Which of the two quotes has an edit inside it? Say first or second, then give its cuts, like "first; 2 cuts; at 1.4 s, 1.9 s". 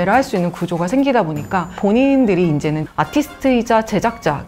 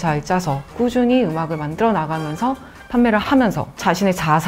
first; 1 cut; at 1.7 s